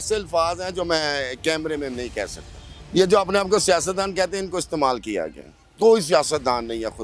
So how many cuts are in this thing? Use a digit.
1